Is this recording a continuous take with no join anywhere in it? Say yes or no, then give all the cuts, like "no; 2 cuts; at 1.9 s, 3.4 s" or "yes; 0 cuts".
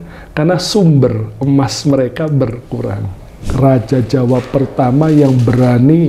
no; 1 cut; at 3.5 s